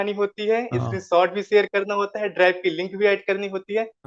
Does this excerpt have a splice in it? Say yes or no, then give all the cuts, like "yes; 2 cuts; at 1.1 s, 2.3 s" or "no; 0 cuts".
no; 0 cuts